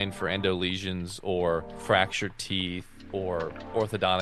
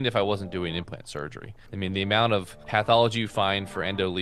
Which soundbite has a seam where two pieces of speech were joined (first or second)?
first